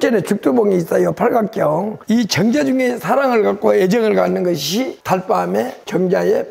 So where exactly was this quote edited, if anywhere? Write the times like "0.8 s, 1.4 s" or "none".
2.0 s